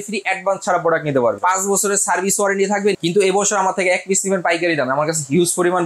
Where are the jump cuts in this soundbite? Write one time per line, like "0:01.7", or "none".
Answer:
0:01.4
0:02.9